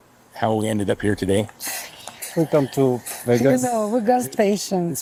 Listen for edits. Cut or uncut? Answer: uncut